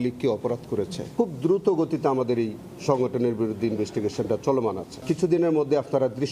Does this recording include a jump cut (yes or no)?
yes